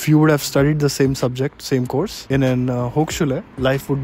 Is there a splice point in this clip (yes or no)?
no